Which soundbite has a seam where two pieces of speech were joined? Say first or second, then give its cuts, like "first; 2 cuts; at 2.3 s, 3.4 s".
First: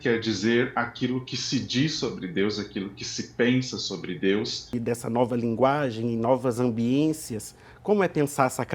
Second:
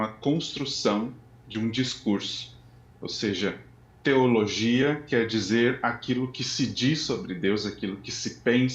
first; 1 cut; at 4.6 s